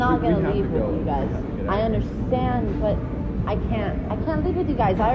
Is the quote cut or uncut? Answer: uncut